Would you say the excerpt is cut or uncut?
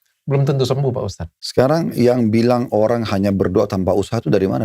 cut